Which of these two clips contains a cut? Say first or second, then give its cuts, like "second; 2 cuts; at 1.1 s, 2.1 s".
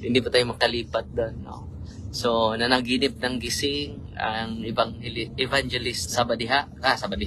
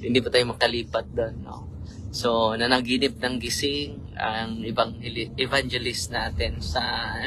first; 1 cut; at 6.0 s